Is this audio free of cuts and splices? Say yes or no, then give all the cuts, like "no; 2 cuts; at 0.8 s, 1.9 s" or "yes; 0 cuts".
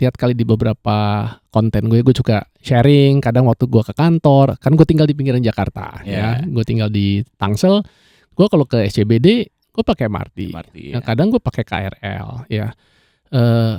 yes; 0 cuts